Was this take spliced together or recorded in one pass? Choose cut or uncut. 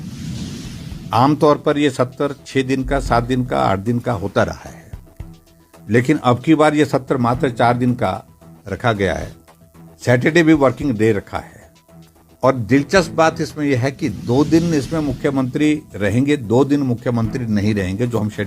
cut